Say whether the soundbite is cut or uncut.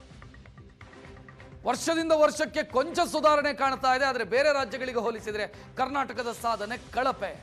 cut